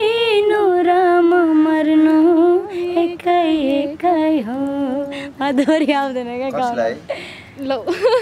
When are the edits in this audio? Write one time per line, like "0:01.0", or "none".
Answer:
none

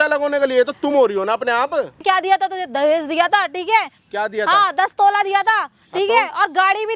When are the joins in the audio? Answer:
0:02.0

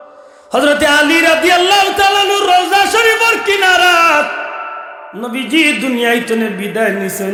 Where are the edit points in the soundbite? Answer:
none

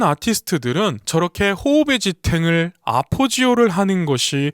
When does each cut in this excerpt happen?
0:01.0

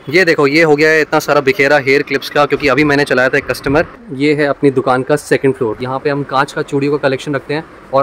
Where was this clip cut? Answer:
0:04.0
0:05.9

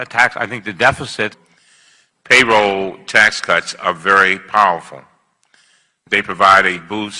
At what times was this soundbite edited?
none

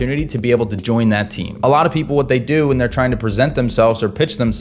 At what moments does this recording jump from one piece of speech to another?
0:01.5

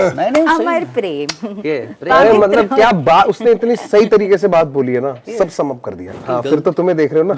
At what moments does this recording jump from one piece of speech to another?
0:06.1

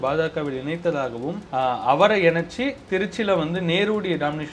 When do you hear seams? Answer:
0:01.4

